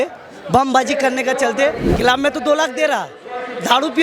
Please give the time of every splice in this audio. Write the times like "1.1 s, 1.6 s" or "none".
1.9 s